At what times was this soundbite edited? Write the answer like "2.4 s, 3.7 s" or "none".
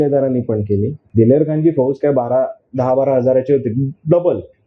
1.0 s